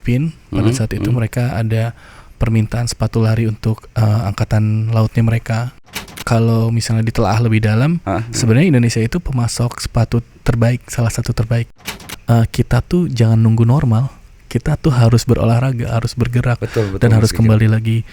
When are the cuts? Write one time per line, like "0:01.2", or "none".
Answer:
0:06.1
0:11.8